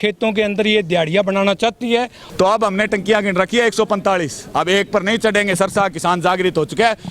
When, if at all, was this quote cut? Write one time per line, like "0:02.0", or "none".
0:02.2